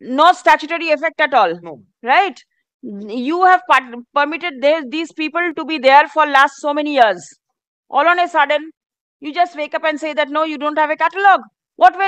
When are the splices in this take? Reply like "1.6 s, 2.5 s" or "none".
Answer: none